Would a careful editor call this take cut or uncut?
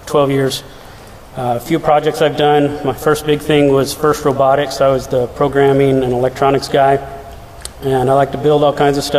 uncut